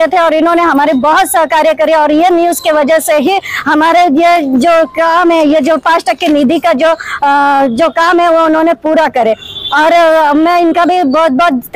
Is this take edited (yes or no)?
no